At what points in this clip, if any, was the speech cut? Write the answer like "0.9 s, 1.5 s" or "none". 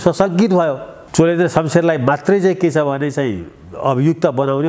0.9 s